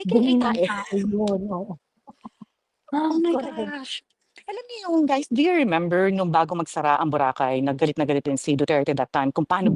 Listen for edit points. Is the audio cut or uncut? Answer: uncut